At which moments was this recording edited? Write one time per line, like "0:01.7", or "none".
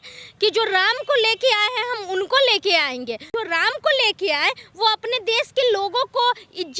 0:03.3